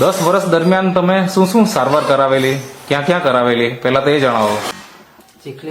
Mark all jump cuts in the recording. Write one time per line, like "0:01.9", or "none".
0:04.7